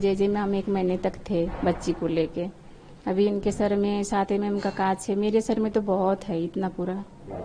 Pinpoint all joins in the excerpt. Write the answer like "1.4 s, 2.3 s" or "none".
none

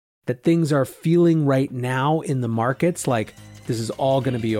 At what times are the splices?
3.5 s

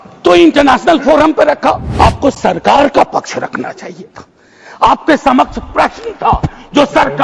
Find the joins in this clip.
1.9 s

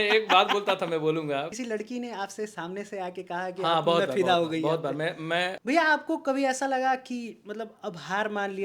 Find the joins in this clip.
1.5 s, 5.6 s

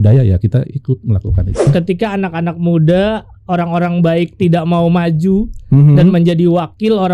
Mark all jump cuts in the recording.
1.7 s

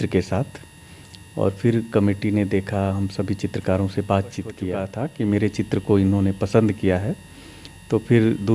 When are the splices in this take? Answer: 4.8 s

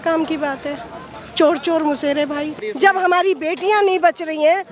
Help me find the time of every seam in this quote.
2.5 s

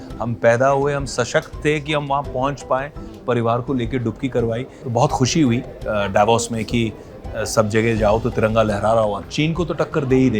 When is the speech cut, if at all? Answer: 4.8 s, 9.2 s

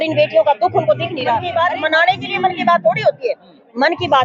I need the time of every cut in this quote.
1.4 s

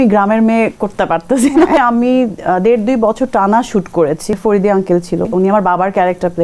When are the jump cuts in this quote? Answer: 1.8 s, 4.3 s, 5.3 s

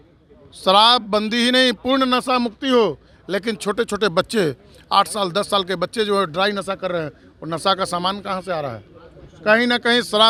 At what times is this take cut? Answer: none

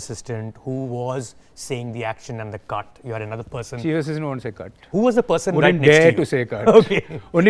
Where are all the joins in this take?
none

